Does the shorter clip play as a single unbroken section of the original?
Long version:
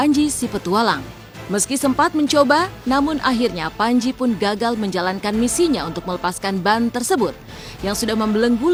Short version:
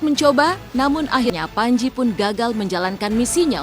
no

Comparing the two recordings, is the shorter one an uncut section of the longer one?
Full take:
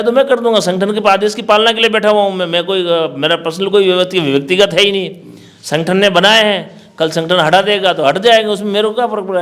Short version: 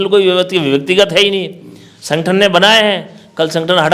yes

